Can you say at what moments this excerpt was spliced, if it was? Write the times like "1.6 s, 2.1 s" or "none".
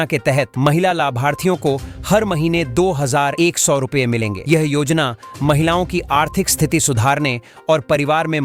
none